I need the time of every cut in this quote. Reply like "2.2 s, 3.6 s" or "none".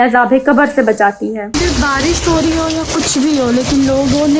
1.5 s